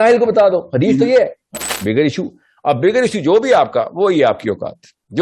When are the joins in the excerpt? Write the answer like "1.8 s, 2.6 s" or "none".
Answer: 1.6 s